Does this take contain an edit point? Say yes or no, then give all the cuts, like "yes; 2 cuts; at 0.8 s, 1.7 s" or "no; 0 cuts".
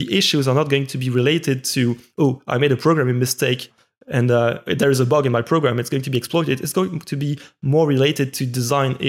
no; 0 cuts